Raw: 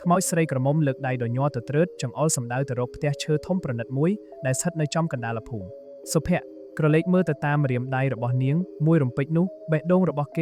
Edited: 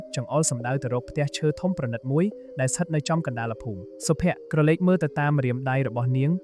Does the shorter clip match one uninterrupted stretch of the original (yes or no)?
no